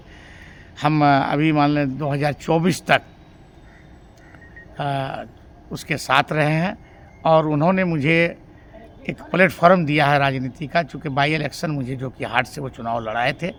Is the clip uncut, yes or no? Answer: yes